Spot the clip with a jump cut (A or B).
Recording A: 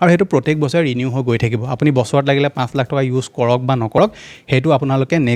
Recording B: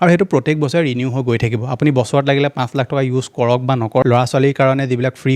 B